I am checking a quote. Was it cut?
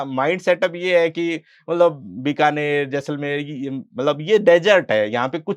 no; 0 cuts

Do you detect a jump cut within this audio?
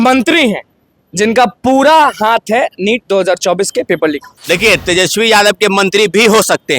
yes; 1 cut; at 4.3 s

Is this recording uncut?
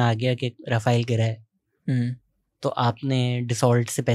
yes; 0 cuts

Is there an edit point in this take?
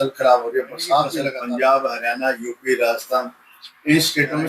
yes; 1 cut; at 1.3 s

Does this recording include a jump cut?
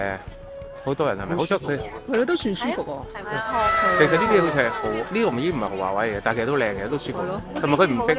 no; 0 cuts

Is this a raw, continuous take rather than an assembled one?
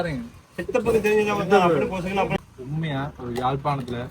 no; 1 cut; at 2.3 s

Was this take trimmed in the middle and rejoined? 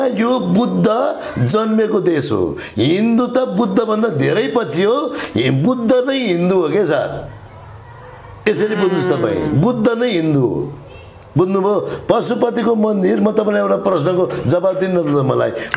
no; 0 cuts

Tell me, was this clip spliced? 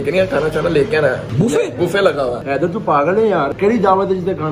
yes; 3 cuts; at 1.2 s, 2.4 s, 3.5 s

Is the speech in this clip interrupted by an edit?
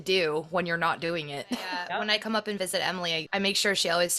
yes; 2 cuts; at 1.8 s, 3.2 s

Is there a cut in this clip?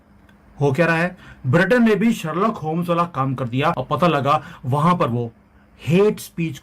yes; 1 cut; at 3.8 s

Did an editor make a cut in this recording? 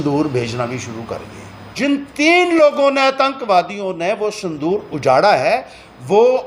yes; 1 cut; at 1.7 s

